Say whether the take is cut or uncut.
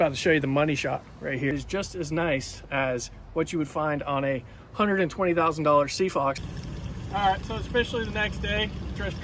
cut